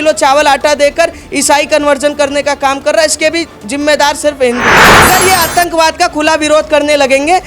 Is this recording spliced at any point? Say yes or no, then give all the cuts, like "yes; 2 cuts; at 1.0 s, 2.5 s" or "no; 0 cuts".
yes; 1 cut; at 5.1 s